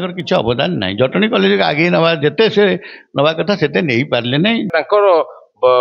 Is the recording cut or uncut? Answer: cut